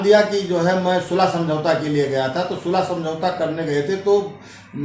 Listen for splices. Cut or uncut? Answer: uncut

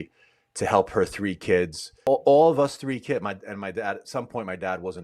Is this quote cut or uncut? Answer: cut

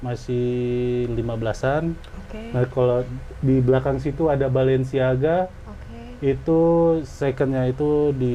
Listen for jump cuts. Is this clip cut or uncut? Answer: uncut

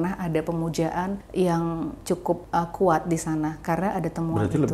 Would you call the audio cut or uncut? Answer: cut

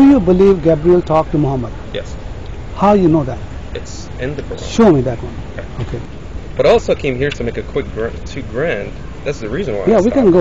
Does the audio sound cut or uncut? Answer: cut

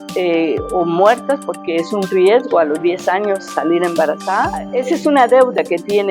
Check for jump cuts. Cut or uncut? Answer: cut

